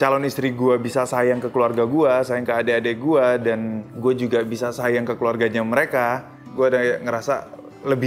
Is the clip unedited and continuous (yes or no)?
yes